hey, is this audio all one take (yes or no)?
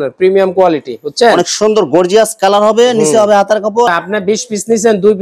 no